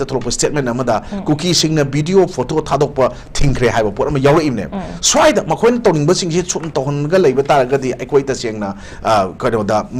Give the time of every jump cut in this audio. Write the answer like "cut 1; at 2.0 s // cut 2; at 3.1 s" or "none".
none